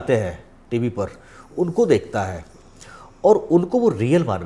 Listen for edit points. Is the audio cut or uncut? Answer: uncut